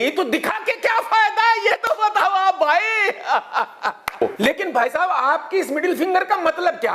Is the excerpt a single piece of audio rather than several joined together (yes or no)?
no